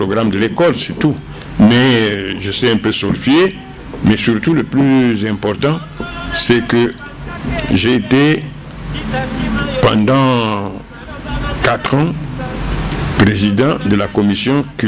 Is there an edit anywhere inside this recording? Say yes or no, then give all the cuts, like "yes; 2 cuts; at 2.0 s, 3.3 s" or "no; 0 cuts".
no; 0 cuts